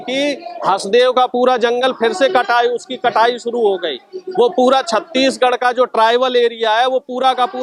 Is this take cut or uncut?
uncut